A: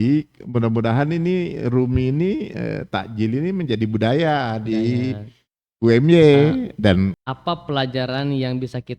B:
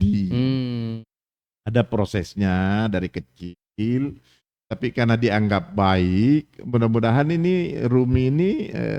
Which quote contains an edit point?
A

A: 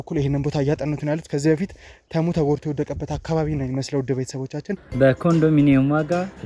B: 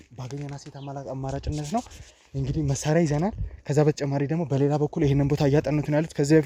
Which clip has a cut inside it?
A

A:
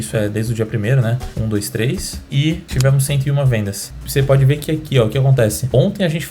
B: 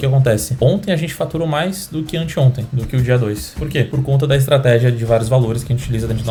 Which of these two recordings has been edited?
A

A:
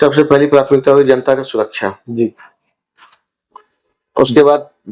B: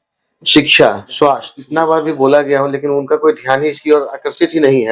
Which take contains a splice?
B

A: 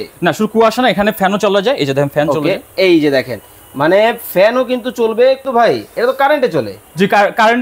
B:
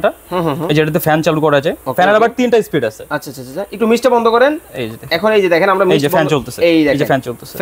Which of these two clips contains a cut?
A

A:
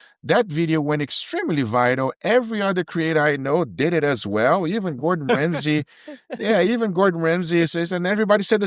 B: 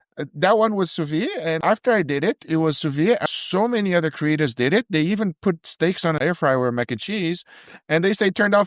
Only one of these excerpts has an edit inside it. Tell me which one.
B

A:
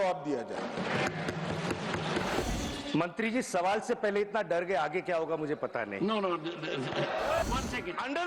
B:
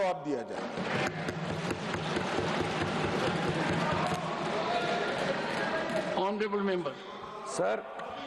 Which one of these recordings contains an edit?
A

